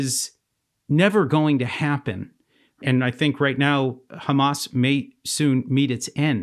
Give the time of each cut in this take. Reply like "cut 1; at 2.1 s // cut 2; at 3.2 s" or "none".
cut 1; at 2.8 s